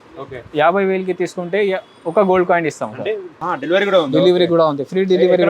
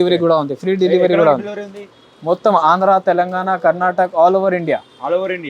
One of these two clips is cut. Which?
first; 1 cut; at 3.3 s

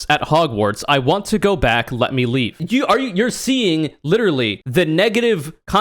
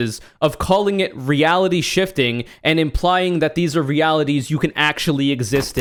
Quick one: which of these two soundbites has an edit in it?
first; 2 cuts; at 2.6 s, 4.6 s

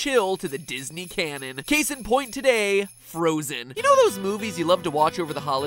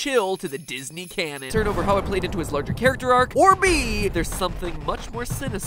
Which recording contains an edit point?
first; 1 cut; at 1.4 s

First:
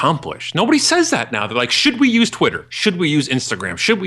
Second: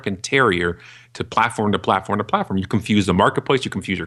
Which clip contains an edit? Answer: first; 1 cut; at 2.7 s

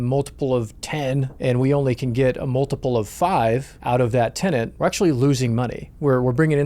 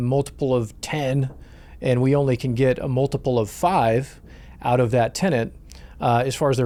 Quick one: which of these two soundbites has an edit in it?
first; 3 cuts; at 1.3 s, 3.7 s, 4.7 s

